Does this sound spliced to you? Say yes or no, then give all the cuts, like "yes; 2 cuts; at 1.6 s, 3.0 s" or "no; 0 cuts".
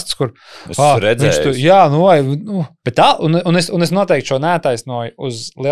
yes; 1 cut; at 2.8 s